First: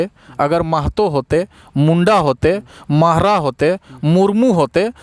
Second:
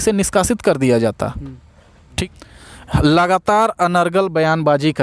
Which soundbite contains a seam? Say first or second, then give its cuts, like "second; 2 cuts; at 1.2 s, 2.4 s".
second; 1 cut; at 2.1 s